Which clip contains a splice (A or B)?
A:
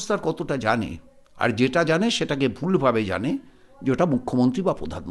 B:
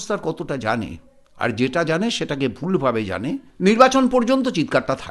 B